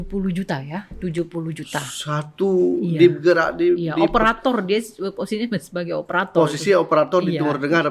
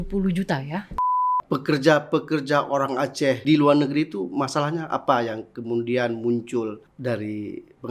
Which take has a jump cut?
second; 3 cuts; at 1.1 s, 3.4 s, 6.9 s

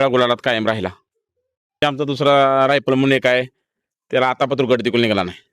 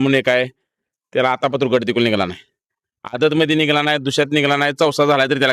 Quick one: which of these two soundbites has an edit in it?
first; 1 cut; at 1.8 s

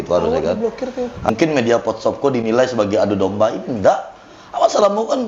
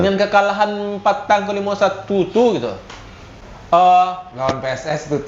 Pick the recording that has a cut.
first; 1 cut; at 1.3 s

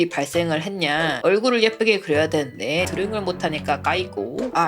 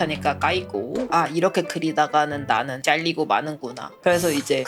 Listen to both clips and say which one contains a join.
first; 1 cut; at 1.1 s

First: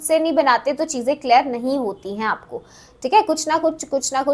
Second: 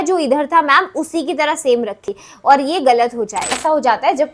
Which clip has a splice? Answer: second; 2 cuts; at 2.0 s, 3.6 s

